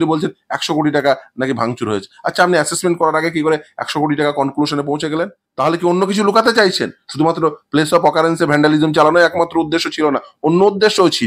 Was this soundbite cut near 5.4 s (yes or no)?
yes